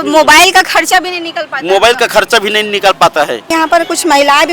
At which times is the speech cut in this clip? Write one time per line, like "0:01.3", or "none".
0:03.5